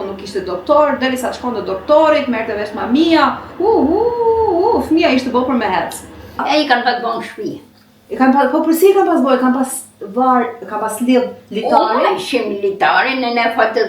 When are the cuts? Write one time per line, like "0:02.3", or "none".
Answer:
0:06.4